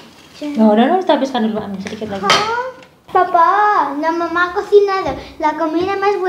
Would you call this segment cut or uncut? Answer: cut